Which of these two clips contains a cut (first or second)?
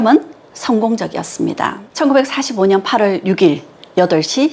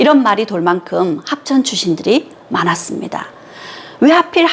first